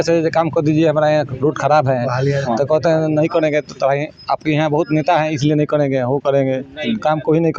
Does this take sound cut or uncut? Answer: uncut